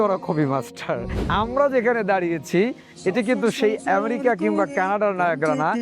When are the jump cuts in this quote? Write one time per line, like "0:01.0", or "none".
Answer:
0:01.2